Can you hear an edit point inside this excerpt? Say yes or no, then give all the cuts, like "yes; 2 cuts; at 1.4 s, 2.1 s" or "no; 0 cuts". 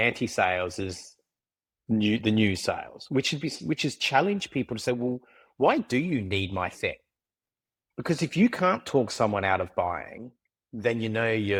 no; 0 cuts